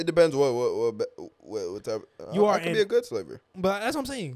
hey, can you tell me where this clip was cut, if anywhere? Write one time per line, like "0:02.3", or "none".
0:03.4